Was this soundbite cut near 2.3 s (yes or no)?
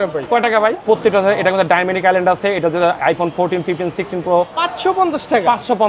no